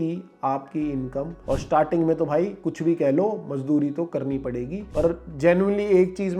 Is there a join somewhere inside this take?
yes; 2 cuts; at 1.4 s, 4.8 s

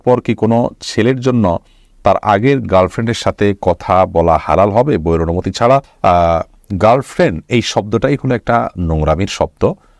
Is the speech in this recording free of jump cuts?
yes; 0 cuts

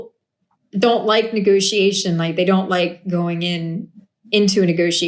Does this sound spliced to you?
no; 0 cuts

